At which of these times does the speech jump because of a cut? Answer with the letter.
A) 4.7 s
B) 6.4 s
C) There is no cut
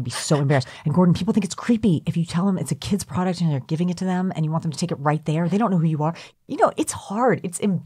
B